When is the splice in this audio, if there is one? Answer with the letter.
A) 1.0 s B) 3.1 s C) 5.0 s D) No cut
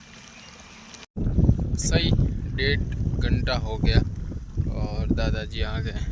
A